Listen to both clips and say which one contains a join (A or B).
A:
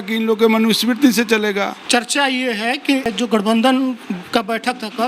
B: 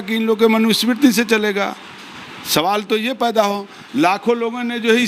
A